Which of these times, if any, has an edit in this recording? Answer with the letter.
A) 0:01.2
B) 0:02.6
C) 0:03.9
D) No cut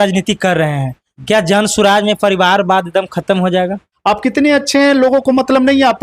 C